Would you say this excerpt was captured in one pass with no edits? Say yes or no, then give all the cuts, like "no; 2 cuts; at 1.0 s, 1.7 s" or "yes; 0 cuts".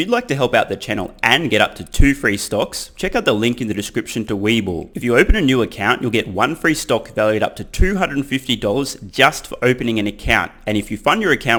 yes; 0 cuts